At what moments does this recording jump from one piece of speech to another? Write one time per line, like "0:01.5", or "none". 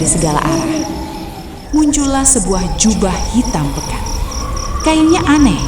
0:01.5